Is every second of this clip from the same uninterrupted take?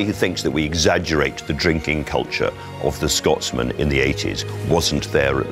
yes; 0 cuts

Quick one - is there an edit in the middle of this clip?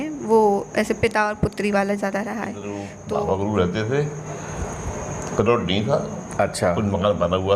yes; 1 cut; at 2.9 s

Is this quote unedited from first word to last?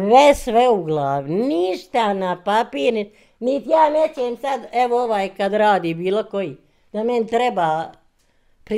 yes; 0 cuts

